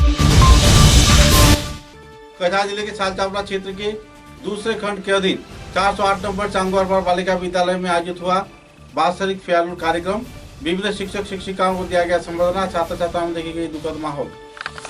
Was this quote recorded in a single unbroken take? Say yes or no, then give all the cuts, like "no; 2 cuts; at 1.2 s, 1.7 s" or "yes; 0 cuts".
yes; 0 cuts